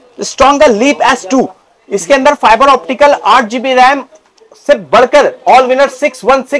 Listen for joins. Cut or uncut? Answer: uncut